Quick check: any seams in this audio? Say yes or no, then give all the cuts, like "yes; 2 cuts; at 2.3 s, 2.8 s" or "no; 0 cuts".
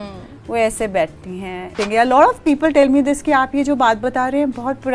yes; 1 cut; at 1.8 s